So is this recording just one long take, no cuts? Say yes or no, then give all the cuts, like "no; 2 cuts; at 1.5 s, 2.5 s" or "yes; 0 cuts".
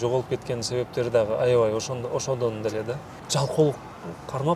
no; 1 cut; at 3.1 s